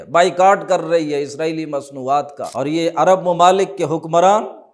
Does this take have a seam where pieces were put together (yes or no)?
yes